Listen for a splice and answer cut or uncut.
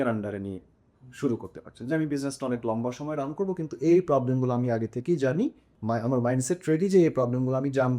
cut